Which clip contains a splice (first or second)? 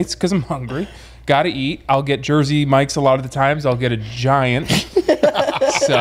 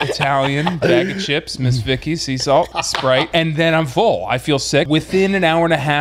second